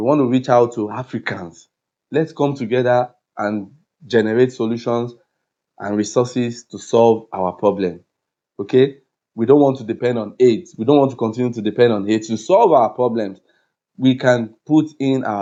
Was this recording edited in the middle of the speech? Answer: no; 0 cuts

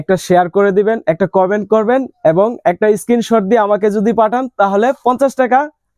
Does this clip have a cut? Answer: no; 0 cuts

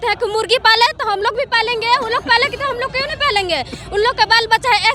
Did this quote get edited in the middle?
no; 0 cuts

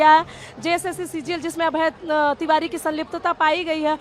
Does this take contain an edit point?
no; 0 cuts

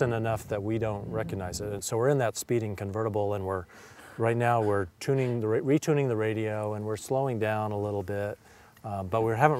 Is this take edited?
yes; 1 cut; at 1.8 s

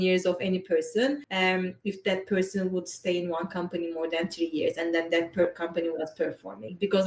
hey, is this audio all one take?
no; 1 cut; at 1.3 s

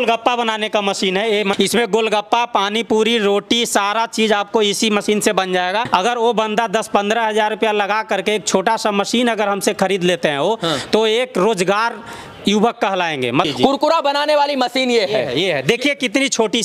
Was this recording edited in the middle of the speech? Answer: yes; 3 cuts; at 1.5 s, 5.9 s, 13.5 s

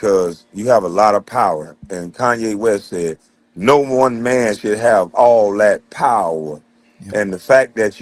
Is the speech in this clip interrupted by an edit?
no; 0 cuts

